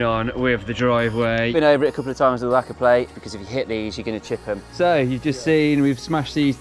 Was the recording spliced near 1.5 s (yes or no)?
yes